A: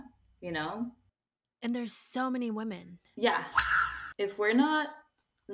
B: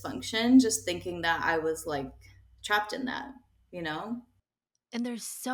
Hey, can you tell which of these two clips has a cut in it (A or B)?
A